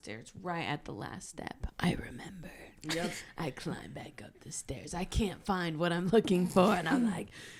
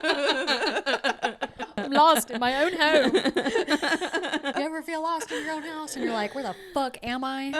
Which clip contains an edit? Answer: second; 2 cuts; at 1.7 s, 4.5 s

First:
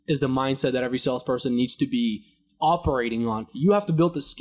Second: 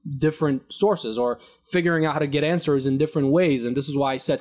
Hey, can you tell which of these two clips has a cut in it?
first; 1 cut; at 3.5 s

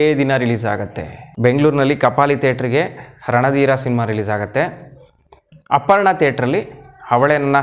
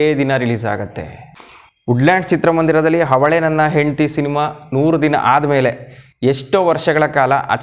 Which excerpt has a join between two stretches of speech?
second; 1 cut; at 1.2 s

